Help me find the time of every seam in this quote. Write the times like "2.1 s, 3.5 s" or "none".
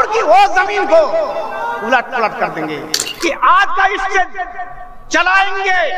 3.0 s